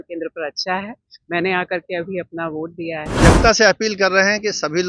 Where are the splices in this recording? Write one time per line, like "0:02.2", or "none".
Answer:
0:03.1